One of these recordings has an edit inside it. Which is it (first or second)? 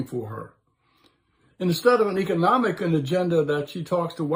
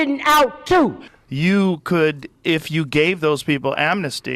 second